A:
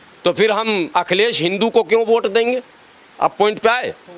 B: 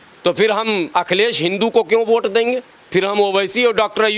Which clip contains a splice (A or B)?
B